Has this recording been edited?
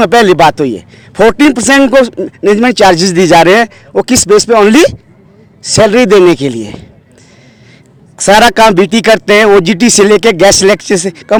no; 0 cuts

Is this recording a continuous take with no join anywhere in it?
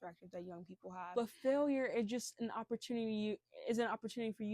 no; 1 cut; at 1.1 s

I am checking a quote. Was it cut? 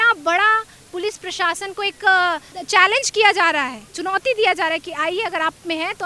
yes; 1 cut; at 2.5 s

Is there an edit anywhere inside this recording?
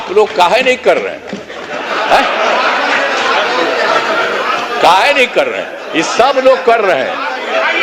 no; 0 cuts

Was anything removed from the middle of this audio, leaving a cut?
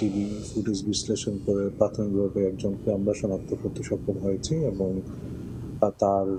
no; 0 cuts

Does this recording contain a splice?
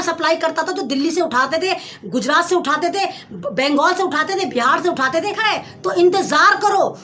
yes; 1 cut; at 5.4 s

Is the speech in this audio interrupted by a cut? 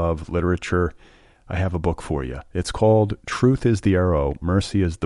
no; 0 cuts

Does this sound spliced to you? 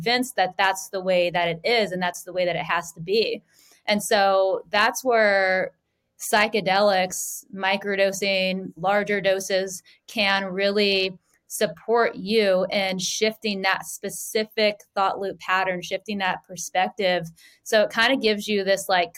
no; 0 cuts

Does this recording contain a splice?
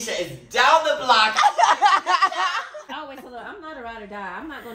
yes; 1 cut; at 2.8 s

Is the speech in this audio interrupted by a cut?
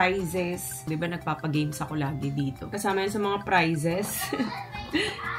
yes; 2 cuts; at 0.9 s, 2.7 s

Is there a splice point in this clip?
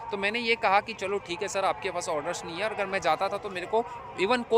no; 0 cuts

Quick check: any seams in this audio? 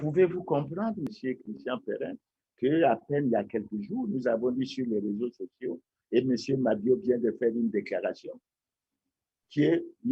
yes; 1 cut; at 1.1 s

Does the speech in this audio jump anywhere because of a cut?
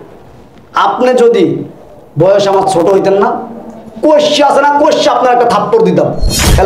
no; 0 cuts

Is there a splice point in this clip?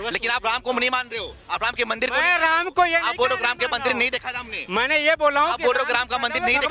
no; 0 cuts

